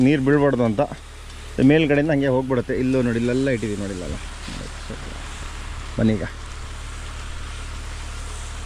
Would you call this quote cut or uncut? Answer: uncut